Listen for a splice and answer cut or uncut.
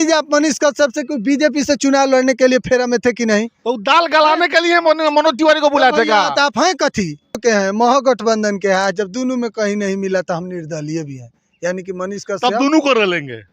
cut